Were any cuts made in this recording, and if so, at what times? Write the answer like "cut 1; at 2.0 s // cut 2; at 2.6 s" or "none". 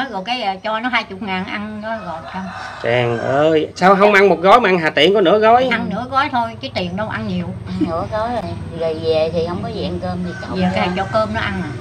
none